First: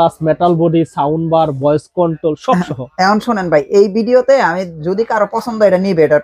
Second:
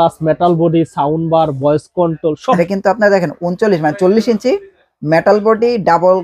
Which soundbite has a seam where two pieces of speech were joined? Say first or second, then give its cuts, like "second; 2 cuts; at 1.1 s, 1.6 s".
second; 1 cut; at 2.6 s